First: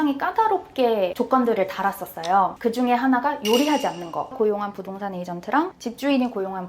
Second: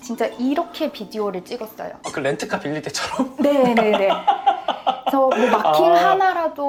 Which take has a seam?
first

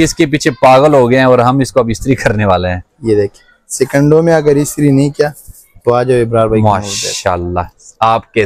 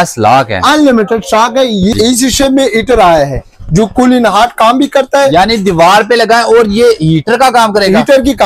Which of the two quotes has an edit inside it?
second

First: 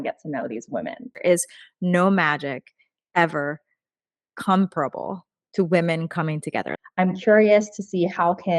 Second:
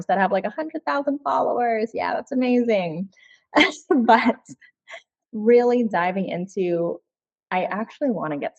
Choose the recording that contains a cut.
first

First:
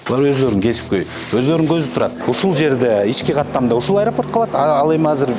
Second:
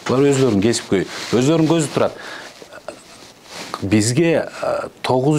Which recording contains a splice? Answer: first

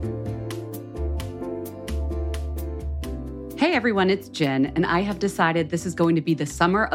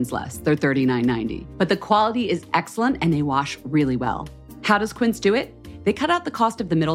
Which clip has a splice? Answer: first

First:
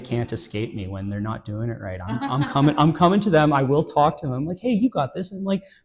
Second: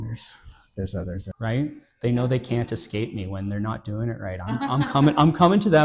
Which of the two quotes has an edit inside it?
second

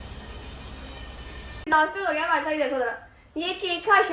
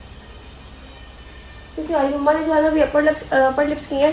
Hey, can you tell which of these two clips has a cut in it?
first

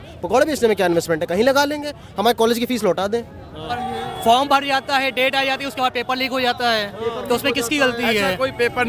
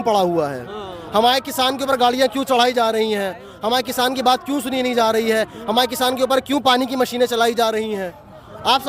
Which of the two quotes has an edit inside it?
first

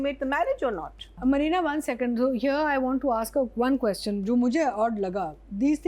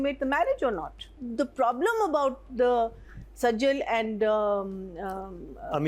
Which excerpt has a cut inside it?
second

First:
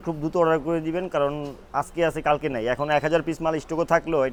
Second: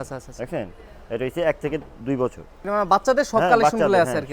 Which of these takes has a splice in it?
second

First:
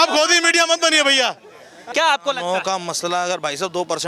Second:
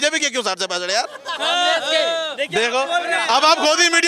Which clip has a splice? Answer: first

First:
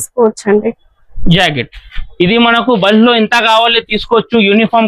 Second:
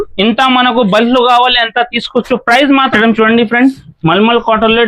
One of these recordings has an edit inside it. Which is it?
second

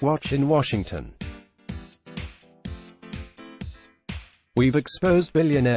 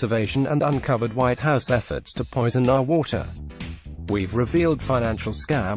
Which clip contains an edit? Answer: first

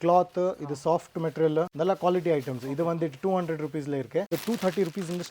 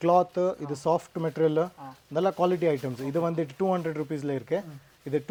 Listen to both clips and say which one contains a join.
first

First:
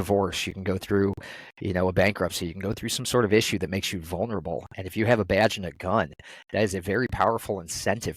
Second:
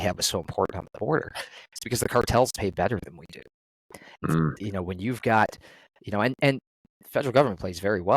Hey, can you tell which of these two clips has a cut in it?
second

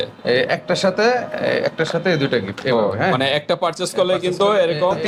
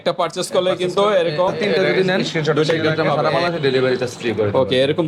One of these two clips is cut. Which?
second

